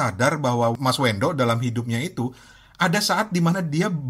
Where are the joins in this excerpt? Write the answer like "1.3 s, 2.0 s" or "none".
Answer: none